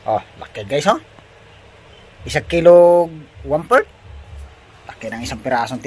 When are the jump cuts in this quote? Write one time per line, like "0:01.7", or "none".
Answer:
none